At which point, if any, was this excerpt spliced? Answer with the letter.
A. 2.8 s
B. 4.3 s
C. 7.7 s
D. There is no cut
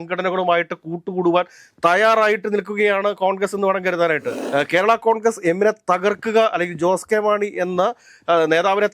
B